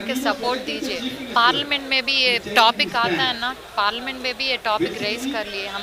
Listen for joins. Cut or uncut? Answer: uncut